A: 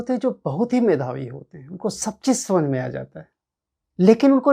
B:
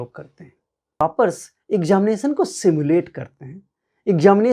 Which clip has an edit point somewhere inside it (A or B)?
B